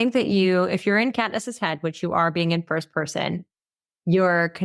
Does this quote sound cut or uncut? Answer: uncut